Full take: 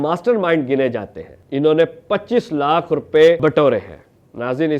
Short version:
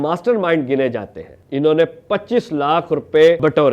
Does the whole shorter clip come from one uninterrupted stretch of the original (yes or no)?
yes